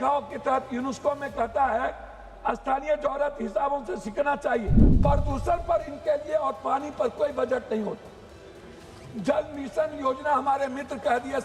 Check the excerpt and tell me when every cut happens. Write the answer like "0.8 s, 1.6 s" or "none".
4.8 s